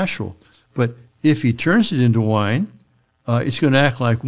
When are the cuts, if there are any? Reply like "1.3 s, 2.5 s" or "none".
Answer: none